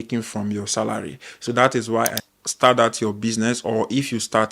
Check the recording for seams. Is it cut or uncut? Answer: cut